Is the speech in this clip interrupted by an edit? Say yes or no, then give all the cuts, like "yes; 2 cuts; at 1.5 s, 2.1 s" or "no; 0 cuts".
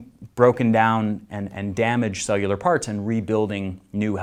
no; 0 cuts